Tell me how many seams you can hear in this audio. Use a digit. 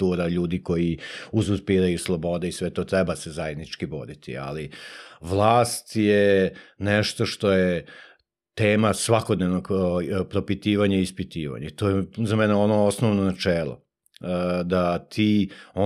0